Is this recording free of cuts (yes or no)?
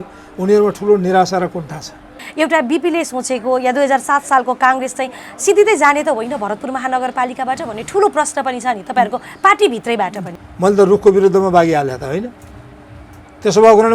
no